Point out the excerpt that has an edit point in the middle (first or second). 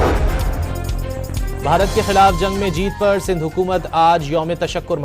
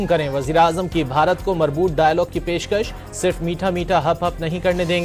first